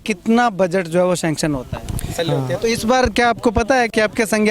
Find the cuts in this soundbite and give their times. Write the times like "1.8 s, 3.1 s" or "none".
2.2 s